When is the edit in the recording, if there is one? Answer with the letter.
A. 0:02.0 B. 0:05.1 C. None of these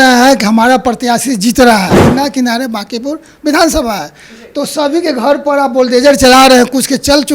A